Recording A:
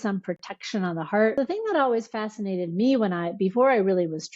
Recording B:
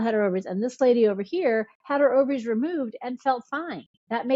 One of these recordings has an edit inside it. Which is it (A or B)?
A